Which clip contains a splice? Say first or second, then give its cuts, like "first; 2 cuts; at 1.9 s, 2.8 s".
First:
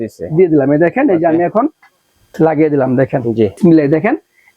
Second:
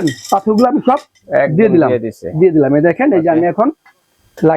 first; 1 cut; at 3.6 s